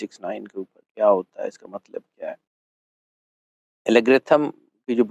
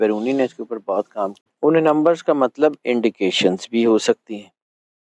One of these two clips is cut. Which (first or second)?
second